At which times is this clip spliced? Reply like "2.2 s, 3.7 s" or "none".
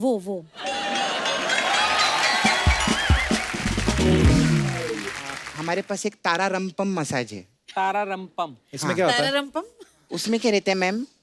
5.5 s